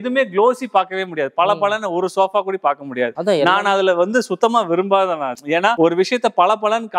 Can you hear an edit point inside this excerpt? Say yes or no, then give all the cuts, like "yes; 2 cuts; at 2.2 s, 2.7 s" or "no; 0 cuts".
no; 0 cuts